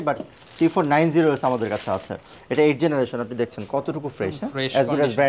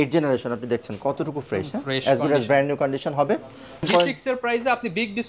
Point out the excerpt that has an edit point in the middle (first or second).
second